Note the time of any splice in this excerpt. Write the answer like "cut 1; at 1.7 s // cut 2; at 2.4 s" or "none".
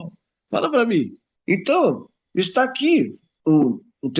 cut 1; at 1.3 s // cut 2; at 3.3 s

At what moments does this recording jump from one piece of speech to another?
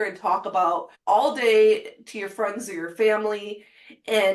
cut 1; at 0.9 s

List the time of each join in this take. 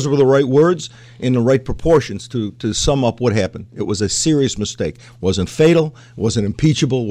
none

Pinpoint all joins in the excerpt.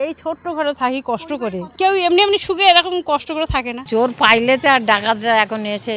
cut 1; at 1.7 s // cut 2; at 3.8 s

